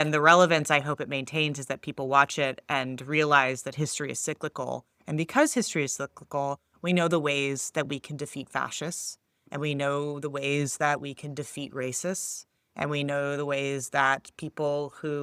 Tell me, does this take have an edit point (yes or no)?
no